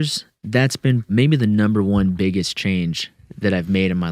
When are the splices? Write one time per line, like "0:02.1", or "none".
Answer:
0:01.1

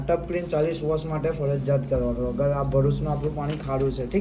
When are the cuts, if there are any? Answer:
none

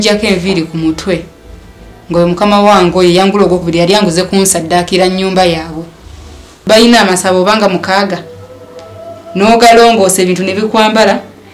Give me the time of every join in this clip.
0:06.6

